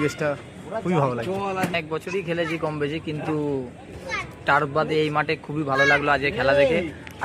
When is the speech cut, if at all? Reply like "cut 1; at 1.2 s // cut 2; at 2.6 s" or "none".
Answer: none

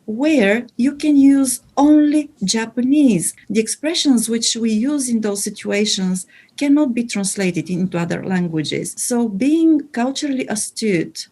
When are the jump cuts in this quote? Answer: cut 1; at 3.3 s // cut 2; at 8.9 s

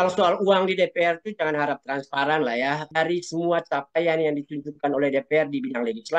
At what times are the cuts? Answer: cut 1; at 2.9 s

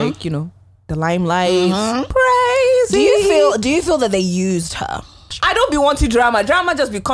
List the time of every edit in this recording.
cut 1; at 2.1 s // cut 2; at 5.3 s

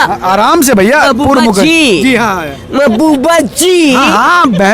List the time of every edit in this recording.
none

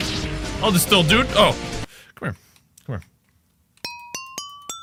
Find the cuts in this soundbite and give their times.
none

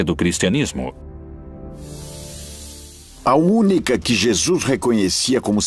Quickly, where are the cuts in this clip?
cut 1; at 4.2 s

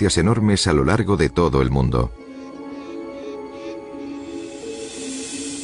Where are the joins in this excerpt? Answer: cut 1; at 2.7 s

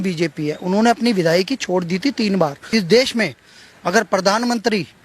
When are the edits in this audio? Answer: cut 1; at 2.6 s

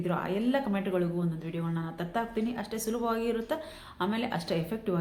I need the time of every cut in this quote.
none

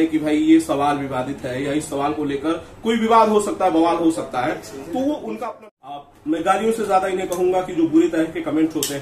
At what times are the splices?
cut 1; at 5.4 s

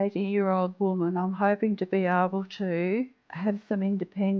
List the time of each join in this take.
cut 1; at 3.2 s

